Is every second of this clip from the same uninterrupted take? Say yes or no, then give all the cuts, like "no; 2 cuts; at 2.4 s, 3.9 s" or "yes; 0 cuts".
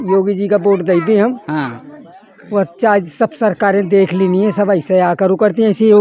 yes; 0 cuts